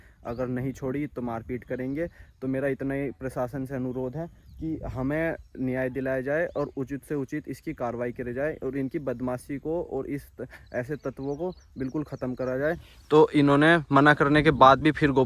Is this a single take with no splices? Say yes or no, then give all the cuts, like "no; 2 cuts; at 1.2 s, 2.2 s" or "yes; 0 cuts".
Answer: yes; 0 cuts